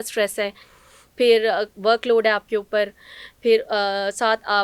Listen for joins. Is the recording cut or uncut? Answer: uncut